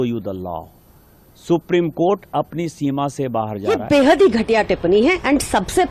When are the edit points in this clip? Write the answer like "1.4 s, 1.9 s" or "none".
3.7 s

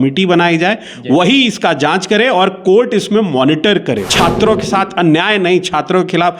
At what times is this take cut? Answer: 4.1 s

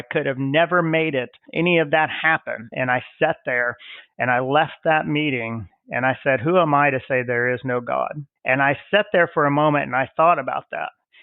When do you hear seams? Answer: 1.4 s, 2.7 s, 8.3 s

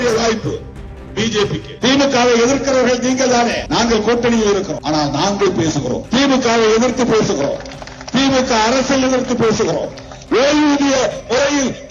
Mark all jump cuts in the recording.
1.7 s, 3.6 s, 4.8 s, 6.0 s

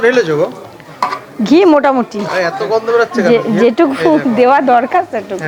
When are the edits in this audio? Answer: none

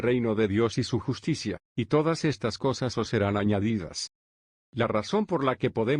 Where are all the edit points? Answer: 4.5 s

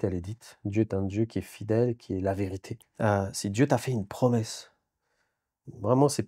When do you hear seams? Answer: 2.7 s

